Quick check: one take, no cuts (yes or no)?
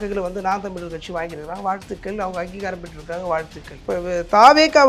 no